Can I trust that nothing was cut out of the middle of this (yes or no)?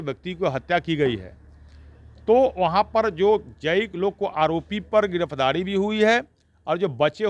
yes